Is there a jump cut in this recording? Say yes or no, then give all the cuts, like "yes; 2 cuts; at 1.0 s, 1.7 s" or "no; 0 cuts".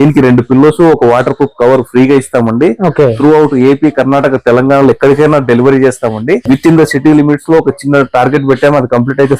yes; 1 cut; at 6.4 s